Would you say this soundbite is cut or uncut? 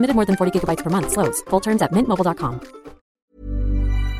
cut